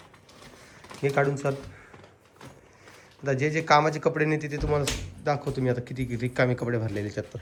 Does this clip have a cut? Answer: no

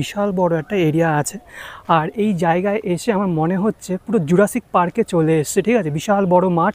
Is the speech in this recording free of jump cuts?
yes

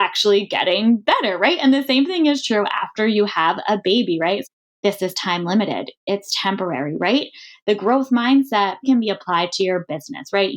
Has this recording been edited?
yes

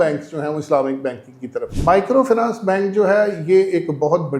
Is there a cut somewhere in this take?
yes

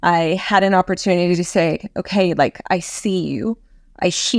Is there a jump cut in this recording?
no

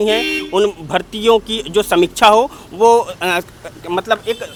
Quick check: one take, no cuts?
yes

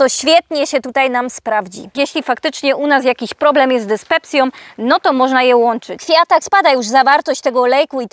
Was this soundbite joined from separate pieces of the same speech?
yes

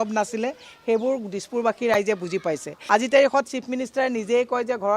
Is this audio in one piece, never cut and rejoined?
no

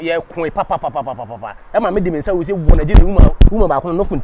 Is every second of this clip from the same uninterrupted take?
yes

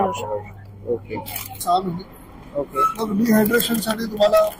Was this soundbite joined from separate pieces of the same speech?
yes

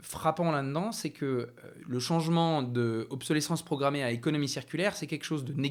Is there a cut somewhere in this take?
no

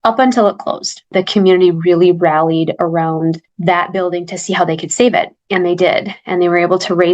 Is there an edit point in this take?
yes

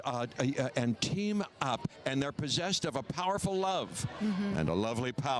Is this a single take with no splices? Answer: yes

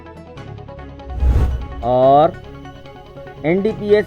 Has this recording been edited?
no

